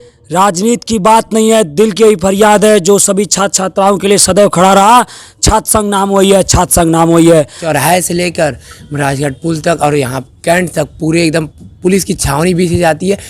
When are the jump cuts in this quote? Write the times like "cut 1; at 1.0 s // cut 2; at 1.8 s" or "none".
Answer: cut 1; at 7.6 s